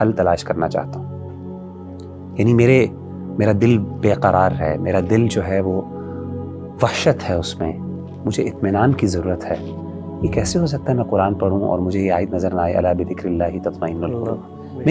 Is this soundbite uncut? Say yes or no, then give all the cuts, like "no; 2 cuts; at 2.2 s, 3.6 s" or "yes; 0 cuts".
yes; 0 cuts